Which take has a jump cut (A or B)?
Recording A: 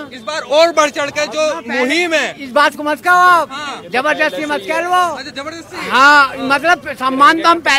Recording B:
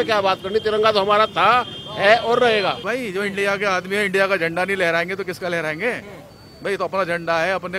B